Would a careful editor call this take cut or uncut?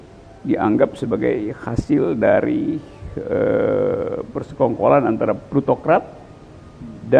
uncut